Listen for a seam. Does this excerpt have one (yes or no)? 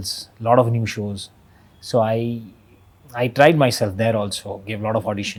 no